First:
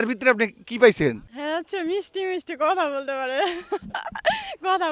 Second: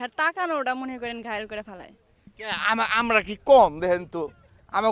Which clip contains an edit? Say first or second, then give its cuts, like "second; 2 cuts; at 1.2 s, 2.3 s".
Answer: first; 1 cut; at 1.3 s